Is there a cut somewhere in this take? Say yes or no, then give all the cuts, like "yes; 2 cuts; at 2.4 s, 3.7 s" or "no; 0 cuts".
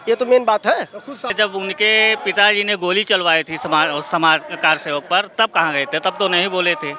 yes; 1 cut; at 1.3 s